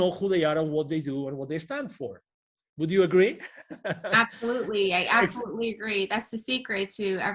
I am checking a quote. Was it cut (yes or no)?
no